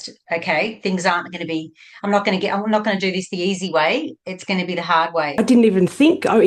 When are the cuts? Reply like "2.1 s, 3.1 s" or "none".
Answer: 5.4 s